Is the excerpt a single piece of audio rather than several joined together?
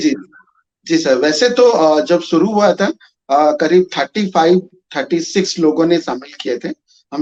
yes; 0 cuts

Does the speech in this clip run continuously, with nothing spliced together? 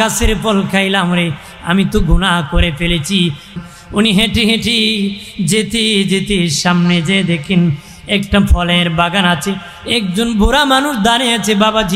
no; 1 cut; at 3.5 s

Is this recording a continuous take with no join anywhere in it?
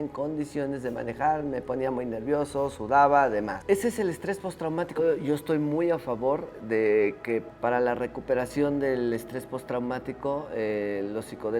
no; 1 cut; at 5.0 s

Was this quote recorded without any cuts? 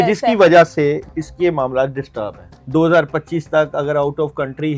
no; 2 cuts; at 1.1 s, 2.5 s

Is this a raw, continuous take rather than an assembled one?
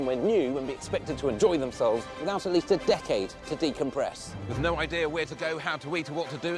yes; 0 cuts

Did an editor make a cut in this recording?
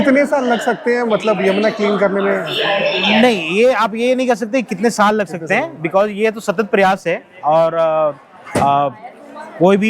no; 0 cuts

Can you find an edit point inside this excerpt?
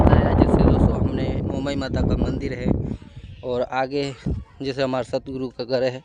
no; 0 cuts

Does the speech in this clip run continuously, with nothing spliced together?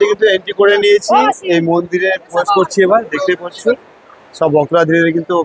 yes; 0 cuts

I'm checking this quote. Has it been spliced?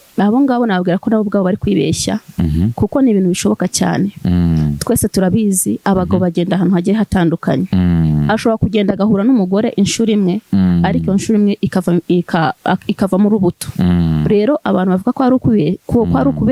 no; 0 cuts

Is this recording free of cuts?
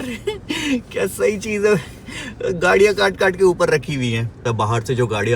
no; 1 cut; at 4.4 s

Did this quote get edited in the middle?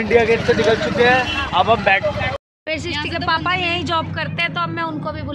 yes; 1 cut; at 2.3 s

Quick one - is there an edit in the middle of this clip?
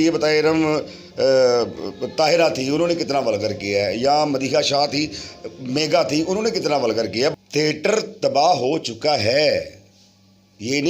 yes; 1 cut; at 7.3 s

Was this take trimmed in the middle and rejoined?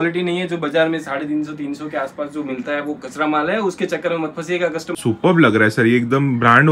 yes; 1 cut; at 5.0 s

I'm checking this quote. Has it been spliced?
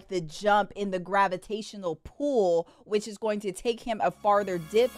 no; 0 cuts

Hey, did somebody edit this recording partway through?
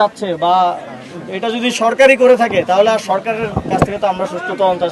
no; 0 cuts

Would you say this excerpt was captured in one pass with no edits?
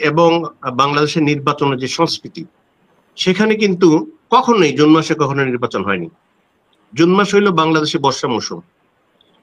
yes; 0 cuts

